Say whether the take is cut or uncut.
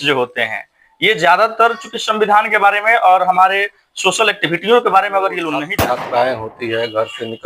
cut